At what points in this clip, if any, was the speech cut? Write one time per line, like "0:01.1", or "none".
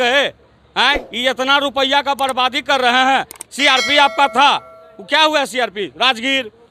none